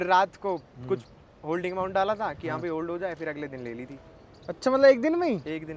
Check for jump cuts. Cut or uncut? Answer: uncut